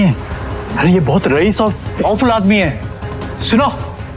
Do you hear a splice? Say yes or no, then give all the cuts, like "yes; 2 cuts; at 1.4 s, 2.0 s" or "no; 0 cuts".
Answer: no; 0 cuts